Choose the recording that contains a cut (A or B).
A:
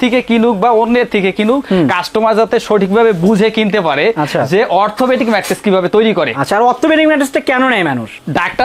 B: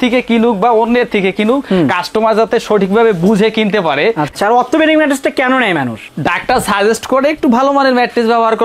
B